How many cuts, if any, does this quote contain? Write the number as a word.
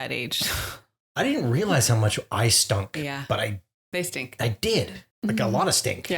one